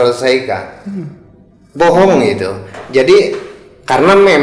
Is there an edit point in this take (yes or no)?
yes